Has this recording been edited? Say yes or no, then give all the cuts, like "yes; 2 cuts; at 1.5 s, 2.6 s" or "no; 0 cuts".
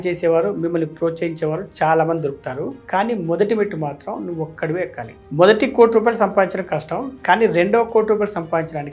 no; 0 cuts